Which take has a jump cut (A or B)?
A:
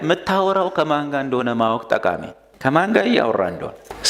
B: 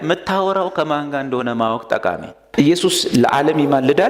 B